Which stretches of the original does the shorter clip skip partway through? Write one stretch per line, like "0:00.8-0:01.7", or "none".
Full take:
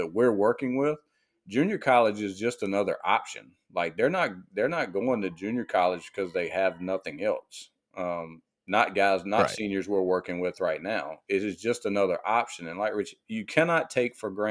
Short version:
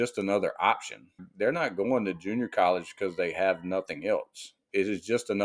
0:03.7-0:04.4
0:07.8-0:11.1